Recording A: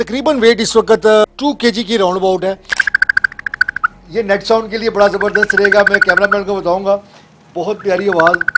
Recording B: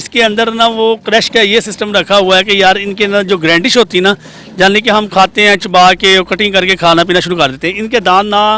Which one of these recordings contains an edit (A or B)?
A